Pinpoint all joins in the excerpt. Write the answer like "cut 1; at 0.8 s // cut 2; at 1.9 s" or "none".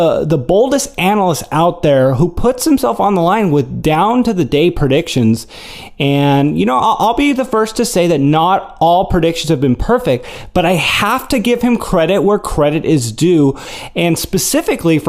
cut 1; at 4.8 s